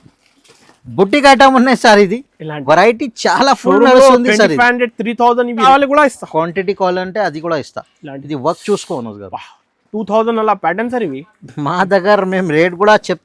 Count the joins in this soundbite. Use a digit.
1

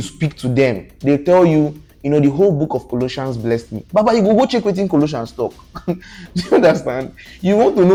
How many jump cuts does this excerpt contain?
0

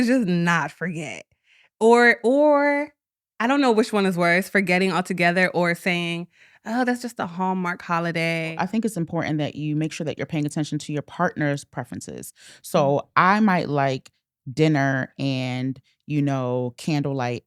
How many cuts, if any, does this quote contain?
1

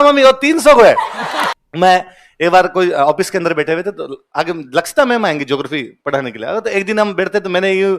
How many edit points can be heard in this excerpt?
1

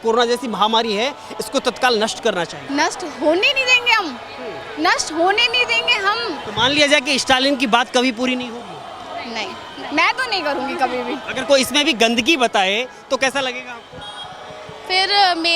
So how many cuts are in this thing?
3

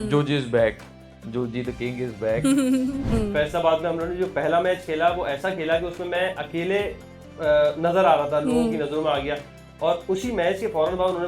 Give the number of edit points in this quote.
1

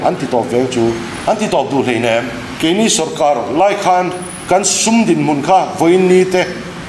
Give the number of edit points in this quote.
2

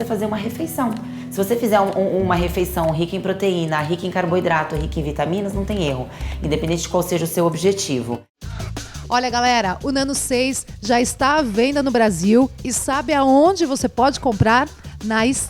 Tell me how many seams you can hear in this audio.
1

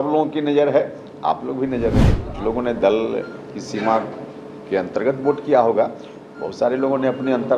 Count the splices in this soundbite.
1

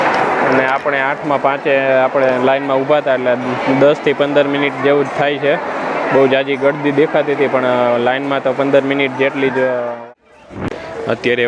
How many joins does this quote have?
1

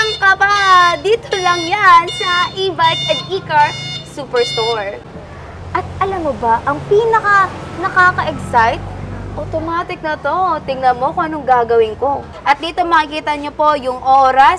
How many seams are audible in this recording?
2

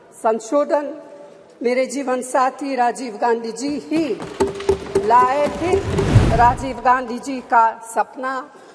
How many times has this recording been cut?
1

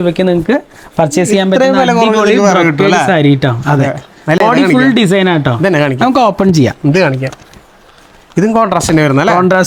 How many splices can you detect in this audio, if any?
0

